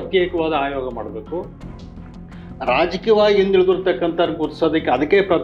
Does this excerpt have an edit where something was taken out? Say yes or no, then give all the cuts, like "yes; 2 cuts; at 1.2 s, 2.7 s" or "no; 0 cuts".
no; 0 cuts